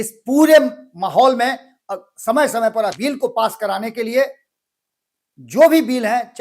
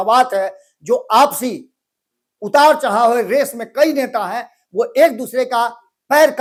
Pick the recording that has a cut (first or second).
first